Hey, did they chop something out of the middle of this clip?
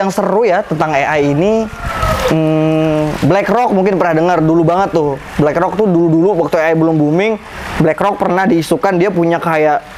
no; 0 cuts

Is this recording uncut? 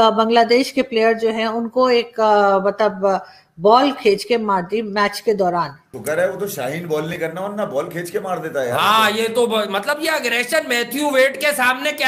no; 1 cut; at 5.9 s

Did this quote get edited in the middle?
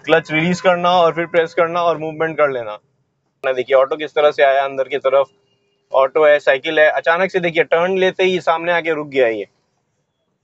yes; 1 cut; at 3.4 s

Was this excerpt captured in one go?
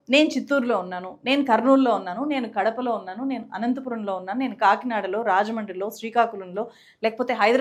yes; 0 cuts

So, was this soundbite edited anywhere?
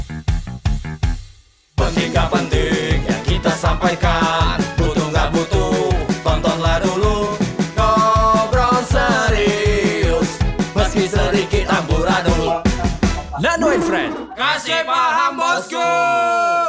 no; 0 cuts

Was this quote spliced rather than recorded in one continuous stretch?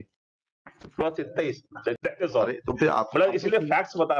yes; 1 cut; at 2.0 s

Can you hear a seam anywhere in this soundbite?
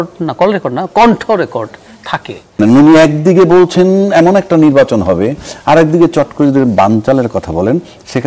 yes; 1 cut; at 2.6 s

